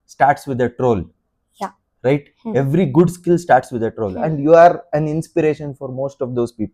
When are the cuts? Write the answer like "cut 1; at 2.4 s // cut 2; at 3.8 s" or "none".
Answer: none